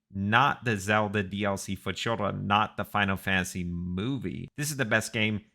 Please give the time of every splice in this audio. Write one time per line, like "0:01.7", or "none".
0:04.5